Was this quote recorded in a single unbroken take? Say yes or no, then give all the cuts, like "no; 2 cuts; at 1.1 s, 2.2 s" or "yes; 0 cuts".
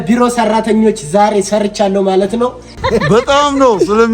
no; 1 cut; at 2.8 s